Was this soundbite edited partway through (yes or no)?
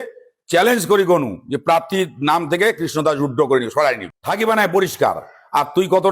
yes